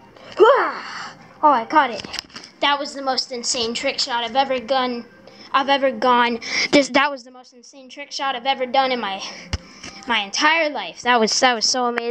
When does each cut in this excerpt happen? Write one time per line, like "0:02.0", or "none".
none